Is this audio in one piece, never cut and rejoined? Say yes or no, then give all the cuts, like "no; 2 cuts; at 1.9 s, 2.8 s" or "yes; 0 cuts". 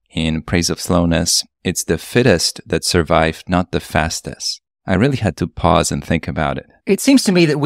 no; 1 cut; at 6.7 s